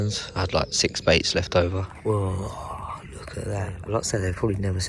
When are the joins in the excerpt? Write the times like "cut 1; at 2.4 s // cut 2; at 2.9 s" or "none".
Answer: cut 1; at 1.9 s // cut 2; at 3.8 s

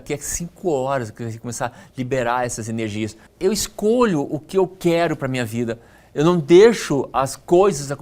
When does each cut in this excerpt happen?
cut 1; at 3.3 s

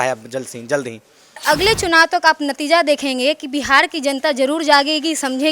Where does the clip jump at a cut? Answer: cut 1; at 1.4 s

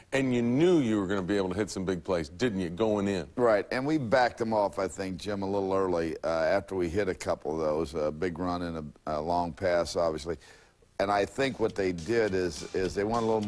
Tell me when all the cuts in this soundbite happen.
cut 1; at 2.9 s

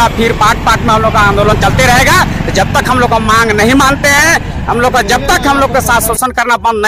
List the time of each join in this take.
none

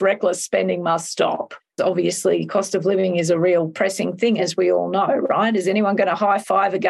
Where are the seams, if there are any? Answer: cut 1; at 1.7 s

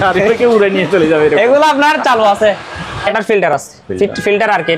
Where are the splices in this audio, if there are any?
cut 1; at 3.1 s

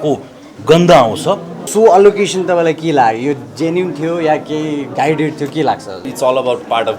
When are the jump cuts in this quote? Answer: cut 1; at 1.6 s // cut 2; at 6.1 s

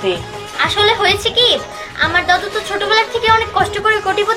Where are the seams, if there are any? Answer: none

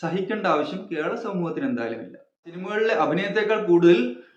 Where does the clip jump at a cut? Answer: cut 1; at 2.5 s

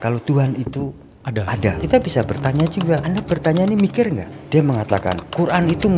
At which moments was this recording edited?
cut 1; at 1.8 s // cut 2; at 3.0 s // cut 3; at 4.3 s

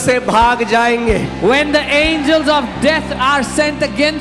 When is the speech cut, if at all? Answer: none

